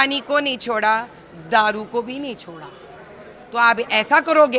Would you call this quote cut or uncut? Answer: uncut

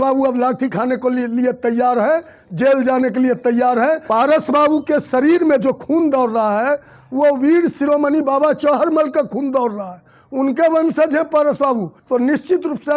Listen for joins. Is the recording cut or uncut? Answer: cut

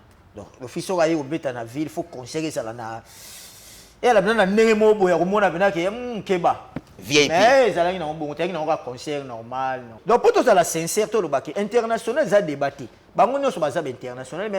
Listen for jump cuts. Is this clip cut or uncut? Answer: cut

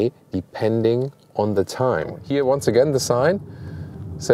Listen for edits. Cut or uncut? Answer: cut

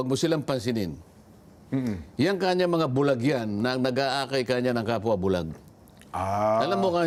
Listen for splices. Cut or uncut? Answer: uncut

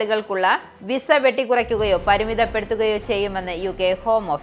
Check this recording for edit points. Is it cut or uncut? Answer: uncut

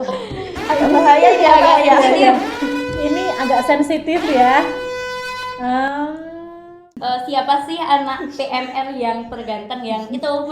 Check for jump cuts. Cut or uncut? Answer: cut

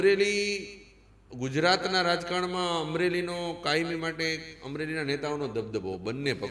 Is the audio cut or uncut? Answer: uncut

